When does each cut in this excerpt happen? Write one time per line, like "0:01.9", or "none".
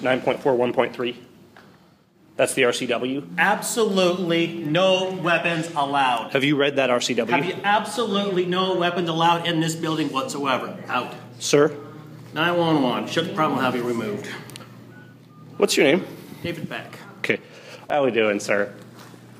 0:17.8